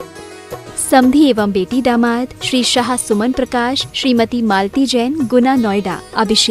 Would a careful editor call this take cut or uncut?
cut